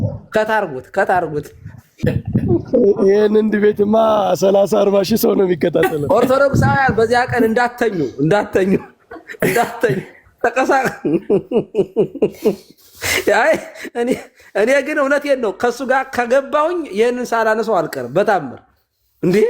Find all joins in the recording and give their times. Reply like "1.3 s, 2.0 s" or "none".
2.0 s